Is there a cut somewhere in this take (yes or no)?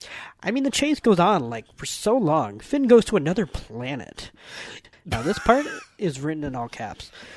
yes